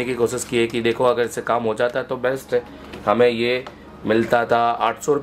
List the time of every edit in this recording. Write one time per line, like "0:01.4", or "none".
none